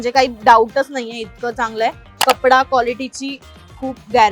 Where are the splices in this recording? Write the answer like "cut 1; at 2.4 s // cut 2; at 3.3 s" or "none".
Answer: cut 1; at 2.1 s